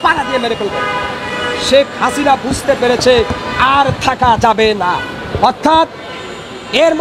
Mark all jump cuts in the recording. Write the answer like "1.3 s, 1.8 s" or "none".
none